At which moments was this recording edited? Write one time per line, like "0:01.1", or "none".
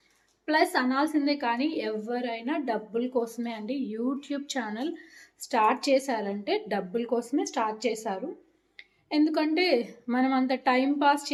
none